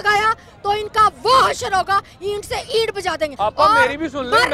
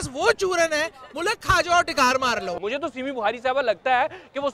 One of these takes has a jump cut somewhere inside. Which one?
second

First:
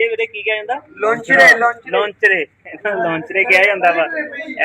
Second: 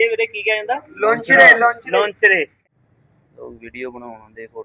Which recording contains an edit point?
second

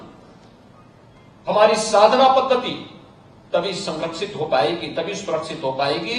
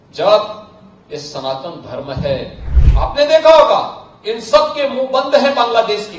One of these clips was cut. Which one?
second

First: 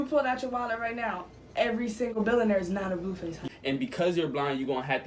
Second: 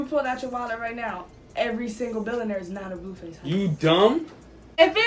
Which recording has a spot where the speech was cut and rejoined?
first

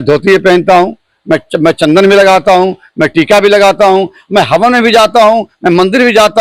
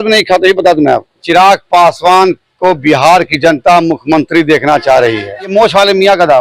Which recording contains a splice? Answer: second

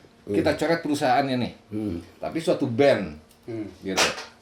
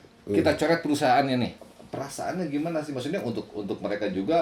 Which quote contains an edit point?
second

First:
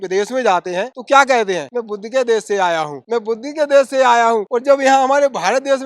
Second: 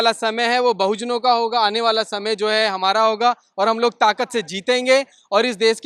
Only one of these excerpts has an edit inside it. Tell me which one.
first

